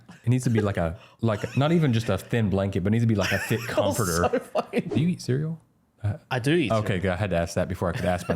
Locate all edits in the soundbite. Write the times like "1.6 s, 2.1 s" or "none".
4.9 s